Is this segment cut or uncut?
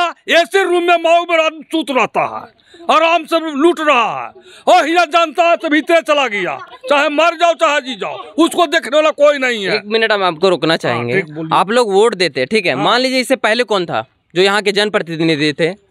uncut